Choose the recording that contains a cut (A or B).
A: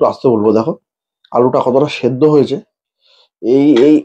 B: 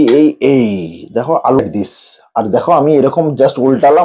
B